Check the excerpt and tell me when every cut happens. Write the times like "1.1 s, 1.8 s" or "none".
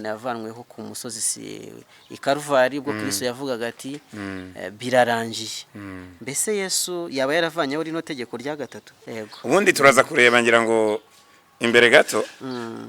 9.0 s